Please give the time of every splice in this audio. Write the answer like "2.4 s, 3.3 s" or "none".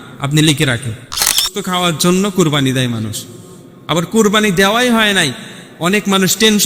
1.5 s

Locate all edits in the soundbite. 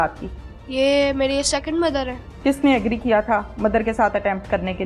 2.2 s

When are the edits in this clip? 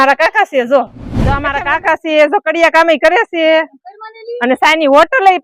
1.4 s

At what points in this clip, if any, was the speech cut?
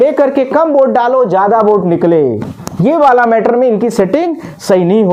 none

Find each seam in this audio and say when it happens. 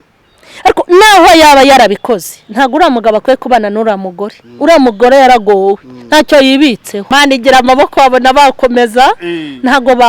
7.0 s

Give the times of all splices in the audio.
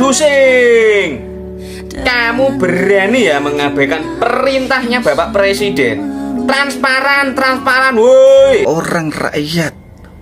8.6 s

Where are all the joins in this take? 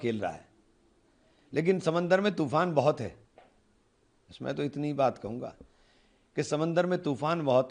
none

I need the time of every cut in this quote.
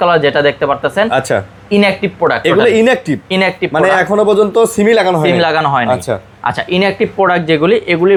none

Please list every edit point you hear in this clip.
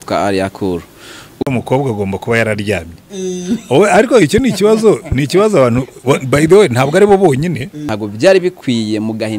1.3 s, 7.8 s

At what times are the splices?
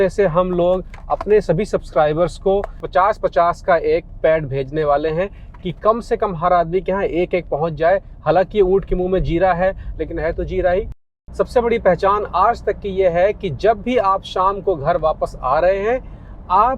11.0 s

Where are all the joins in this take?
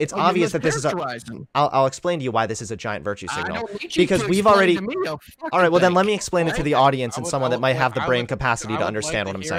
none

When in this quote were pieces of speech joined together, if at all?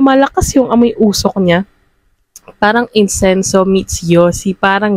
none

